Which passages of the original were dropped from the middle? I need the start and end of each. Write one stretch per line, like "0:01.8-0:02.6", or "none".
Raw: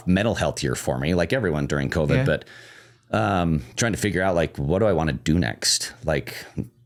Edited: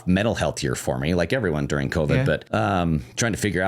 0:02.4-0:03.0